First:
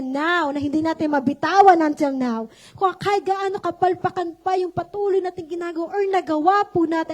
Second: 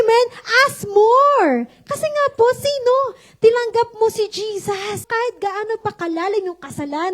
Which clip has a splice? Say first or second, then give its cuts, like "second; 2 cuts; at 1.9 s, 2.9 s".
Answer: second; 1 cut; at 5.0 s